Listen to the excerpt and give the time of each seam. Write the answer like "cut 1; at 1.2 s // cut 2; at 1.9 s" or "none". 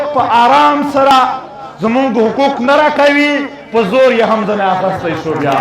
cut 1; at 1.1 s